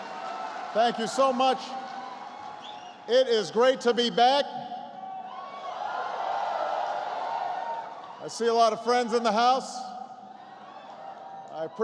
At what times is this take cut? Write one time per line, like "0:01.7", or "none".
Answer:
0:08.0